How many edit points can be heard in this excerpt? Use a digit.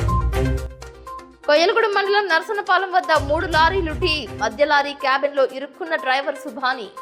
1